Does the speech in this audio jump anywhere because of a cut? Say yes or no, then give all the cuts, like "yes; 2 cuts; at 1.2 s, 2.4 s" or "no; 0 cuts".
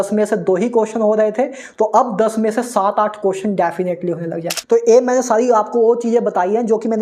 yes; 1 cut; at 4.6 s